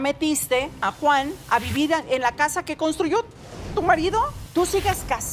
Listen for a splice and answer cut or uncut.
cut